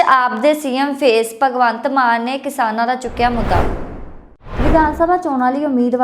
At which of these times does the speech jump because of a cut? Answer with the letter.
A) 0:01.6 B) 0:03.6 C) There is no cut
C